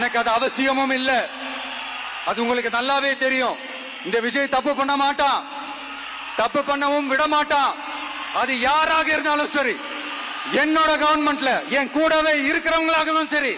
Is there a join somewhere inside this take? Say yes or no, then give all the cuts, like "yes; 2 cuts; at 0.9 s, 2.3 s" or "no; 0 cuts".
no; 0 cuts